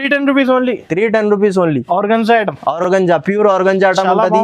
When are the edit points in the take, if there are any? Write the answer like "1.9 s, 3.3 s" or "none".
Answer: none